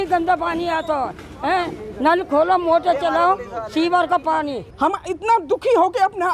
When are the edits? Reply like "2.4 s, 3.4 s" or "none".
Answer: 4.6 s